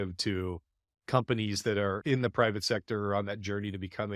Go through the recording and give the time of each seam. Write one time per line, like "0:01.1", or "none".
0:02.0